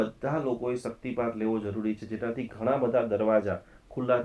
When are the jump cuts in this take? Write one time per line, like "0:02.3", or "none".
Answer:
none